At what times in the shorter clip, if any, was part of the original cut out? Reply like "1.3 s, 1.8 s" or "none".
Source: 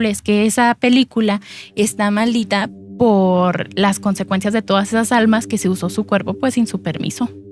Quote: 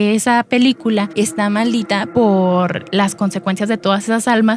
1.1 s, 2.1 s